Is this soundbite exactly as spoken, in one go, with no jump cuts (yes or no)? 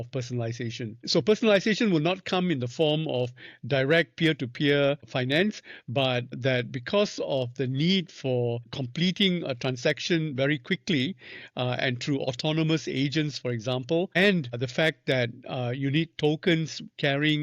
no